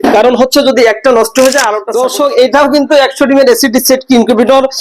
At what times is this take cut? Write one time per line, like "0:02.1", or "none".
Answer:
0:01.8